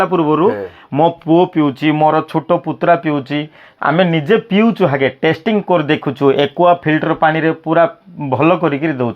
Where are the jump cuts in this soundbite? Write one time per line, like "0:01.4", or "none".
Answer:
none

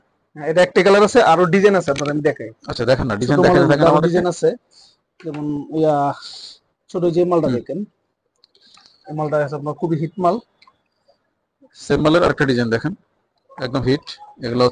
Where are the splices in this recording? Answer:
none

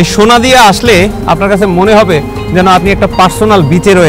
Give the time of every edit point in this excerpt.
0:01.2

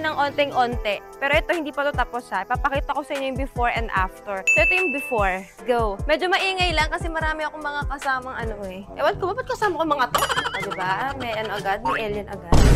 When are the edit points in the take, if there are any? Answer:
none

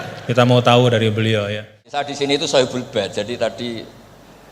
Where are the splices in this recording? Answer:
0:01.9

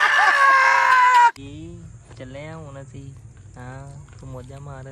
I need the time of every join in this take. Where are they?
0:01.4

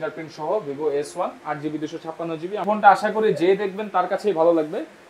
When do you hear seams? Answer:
0:02.6

